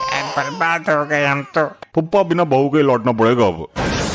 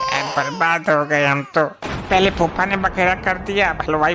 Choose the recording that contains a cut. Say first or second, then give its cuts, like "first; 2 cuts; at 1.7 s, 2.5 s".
first; 1 cut; at 1.8 s